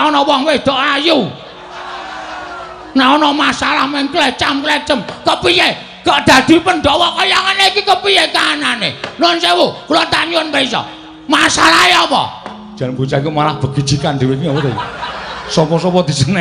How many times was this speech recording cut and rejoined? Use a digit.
0